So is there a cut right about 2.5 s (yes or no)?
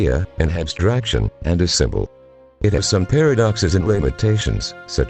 yes